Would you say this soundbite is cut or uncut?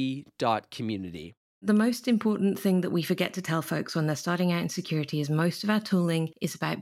cut